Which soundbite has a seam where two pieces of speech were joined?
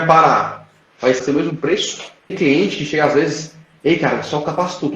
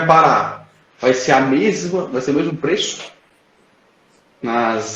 first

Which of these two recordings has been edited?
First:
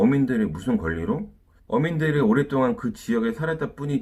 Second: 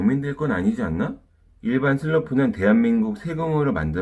second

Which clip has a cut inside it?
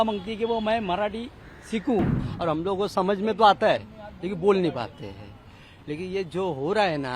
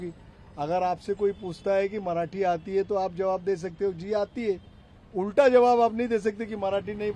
first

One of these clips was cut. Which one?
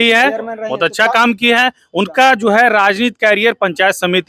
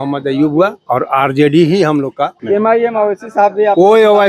second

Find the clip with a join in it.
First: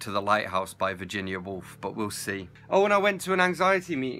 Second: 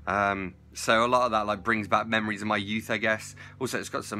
first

